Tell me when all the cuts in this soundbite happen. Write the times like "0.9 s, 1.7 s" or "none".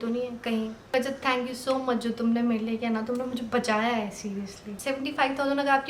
0.9 s, 4.8 s